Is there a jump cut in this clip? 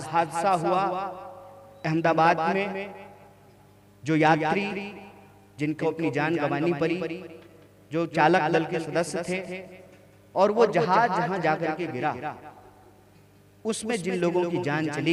no; 0 cuts

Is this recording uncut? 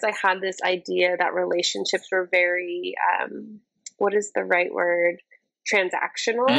yes; 0 cuts

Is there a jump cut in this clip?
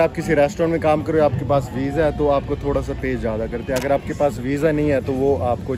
no; 0 cuts

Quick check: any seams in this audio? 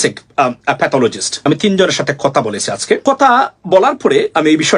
yes; 2 cuts; at 1.3 s, 3.0 s

